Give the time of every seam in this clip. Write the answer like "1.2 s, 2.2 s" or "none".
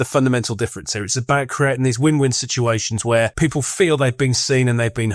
3.3 s